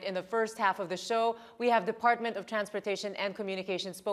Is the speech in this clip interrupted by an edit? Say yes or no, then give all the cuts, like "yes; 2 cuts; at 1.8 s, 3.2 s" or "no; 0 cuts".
yes; 1 cut; at 1.7 s